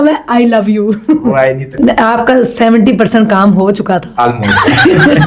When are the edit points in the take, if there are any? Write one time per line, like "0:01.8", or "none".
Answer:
0:01.7

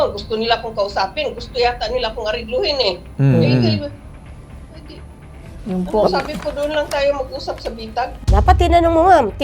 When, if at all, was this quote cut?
0:08.2

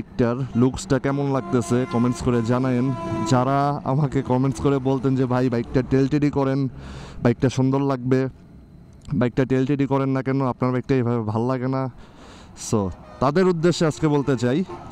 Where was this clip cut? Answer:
none

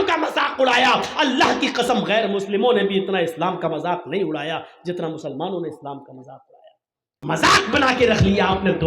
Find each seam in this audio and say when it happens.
0:07.4

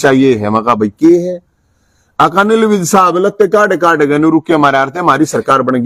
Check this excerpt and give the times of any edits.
none

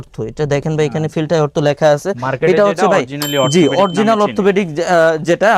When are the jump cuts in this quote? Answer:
none

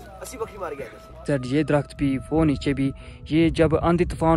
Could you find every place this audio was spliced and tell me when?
0:01.2

